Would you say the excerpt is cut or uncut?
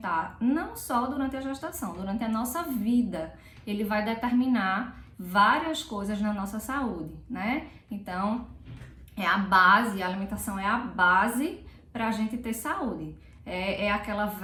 uncut